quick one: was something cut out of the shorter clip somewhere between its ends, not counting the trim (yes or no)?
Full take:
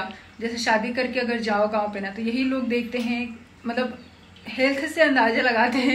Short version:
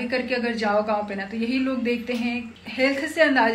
yes